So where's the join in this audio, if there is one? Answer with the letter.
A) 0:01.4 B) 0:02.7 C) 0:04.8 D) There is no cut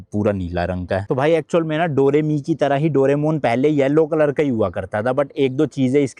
D